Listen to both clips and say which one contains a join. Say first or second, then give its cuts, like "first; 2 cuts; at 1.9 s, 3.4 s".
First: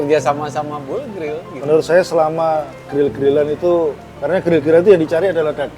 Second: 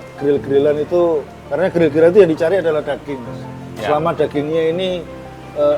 first; 1 cut; at 1.5 s